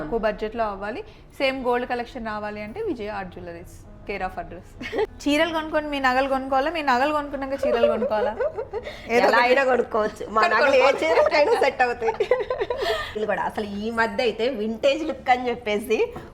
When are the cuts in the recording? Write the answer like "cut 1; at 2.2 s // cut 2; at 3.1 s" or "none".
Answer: cut 1; at 5.1 s // cut 2; at 13.2 s